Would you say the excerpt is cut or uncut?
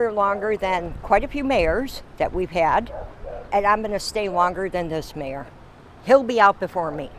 uncut